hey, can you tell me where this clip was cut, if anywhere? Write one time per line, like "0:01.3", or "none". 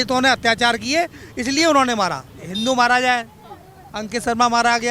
0:02.2